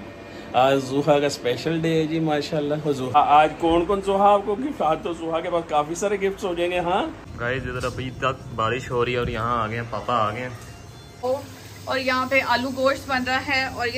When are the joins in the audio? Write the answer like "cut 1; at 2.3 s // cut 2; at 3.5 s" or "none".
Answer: cut 1; at 3.1 s // cut 2; at 7.3 s // cut 3; at 11.2 s